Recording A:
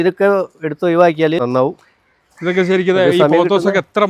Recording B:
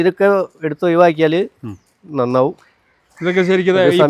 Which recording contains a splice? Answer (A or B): A